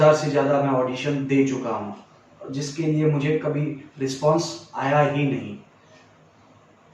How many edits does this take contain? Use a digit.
0